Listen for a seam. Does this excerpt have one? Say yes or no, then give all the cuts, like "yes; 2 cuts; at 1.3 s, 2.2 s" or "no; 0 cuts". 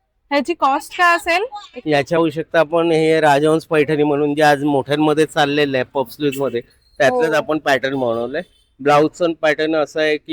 no; 0 cuts